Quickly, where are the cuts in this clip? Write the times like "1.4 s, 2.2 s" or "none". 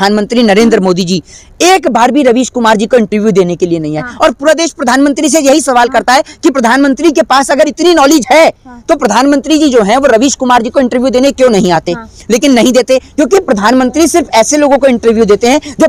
none